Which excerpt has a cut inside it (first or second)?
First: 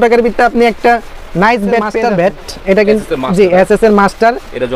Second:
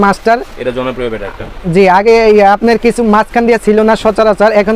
first